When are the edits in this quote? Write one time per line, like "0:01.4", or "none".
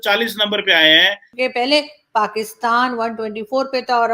0:01.2